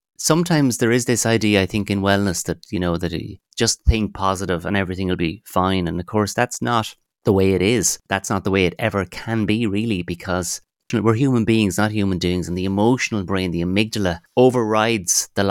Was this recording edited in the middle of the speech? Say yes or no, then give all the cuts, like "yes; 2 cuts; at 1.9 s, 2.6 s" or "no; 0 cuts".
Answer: yes; 3 cuts; at 8.0 s, 10.9 s, 14.2 s